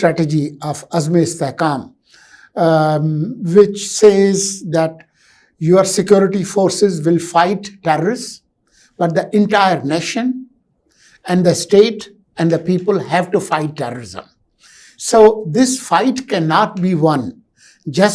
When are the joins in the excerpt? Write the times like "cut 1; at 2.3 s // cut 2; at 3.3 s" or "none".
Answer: none